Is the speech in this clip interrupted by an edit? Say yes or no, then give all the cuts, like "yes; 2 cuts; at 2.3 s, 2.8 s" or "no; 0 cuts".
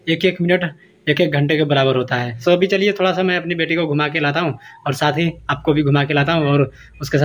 no; 0 cuts